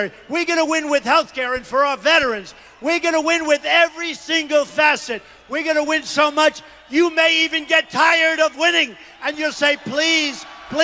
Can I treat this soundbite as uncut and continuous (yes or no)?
yes